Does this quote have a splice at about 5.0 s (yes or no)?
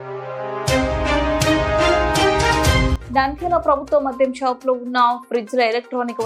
no